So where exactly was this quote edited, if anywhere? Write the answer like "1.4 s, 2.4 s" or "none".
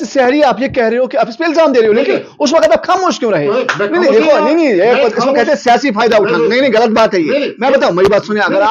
none